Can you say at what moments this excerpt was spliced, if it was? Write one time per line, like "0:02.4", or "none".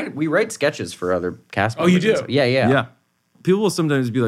0:03.3